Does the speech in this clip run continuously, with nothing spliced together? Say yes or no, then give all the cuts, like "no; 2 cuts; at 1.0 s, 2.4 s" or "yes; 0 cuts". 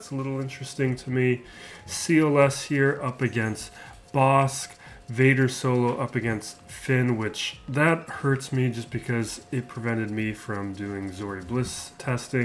yes; 0 cuts